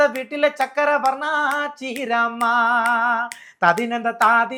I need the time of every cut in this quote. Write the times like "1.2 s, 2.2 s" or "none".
none